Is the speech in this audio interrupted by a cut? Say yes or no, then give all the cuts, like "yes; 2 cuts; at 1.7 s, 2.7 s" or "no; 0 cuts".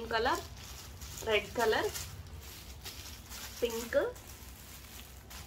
no; 0 cuts